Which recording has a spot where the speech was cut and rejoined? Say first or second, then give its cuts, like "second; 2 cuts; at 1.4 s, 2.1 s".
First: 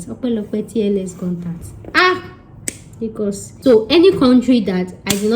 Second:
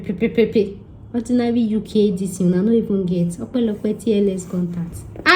first; 1 cut; at 3.6 s